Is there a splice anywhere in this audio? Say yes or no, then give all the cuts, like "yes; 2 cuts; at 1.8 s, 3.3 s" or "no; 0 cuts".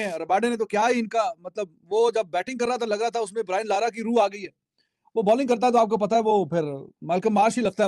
no; 0 cuts